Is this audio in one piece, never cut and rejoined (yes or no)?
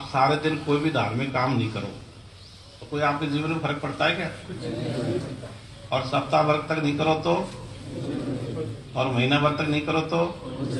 yes